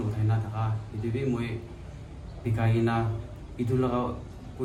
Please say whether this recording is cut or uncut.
uncut